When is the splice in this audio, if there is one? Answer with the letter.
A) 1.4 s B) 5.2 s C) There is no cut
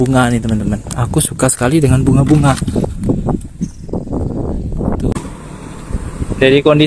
B